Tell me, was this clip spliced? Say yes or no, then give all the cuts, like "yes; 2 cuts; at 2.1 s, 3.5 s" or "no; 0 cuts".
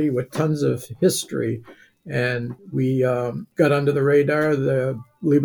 yes; 2 cuts; at 2.6 s, 3.4 s